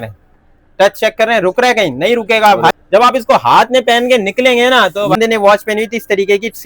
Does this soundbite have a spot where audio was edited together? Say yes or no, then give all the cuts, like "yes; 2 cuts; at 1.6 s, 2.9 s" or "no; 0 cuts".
yes; 2 cuts; at 2.7 s, 5.1 s